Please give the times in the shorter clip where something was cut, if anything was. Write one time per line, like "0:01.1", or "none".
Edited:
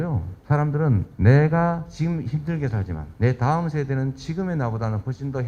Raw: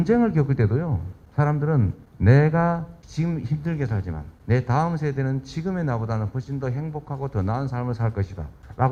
0:00.8
0:01.9
0:03.0